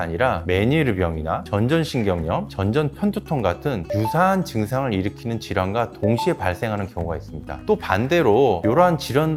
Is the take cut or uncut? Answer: uncut